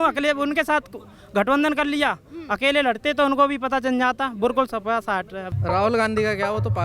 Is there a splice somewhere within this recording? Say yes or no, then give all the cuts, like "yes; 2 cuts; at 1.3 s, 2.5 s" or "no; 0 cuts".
yes; 1 cut; at 5.5 s